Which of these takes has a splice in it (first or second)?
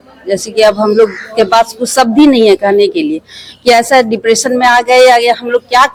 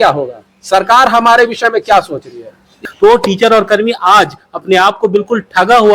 second